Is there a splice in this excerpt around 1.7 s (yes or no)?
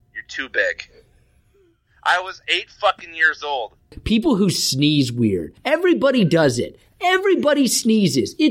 no